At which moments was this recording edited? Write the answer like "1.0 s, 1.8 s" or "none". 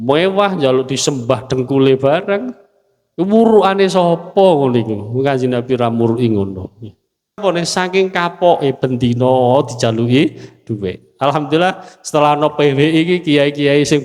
7.4 s